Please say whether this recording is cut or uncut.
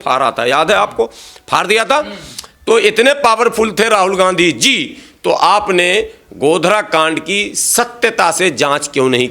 uncut